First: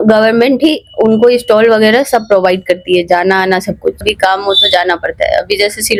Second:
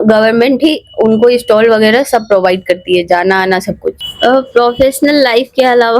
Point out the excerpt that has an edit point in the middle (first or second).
second